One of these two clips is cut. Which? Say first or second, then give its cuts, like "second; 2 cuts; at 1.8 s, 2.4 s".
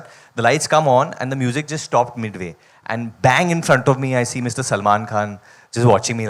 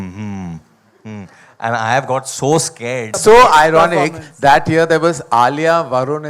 second; 1 cut; at 3.2 s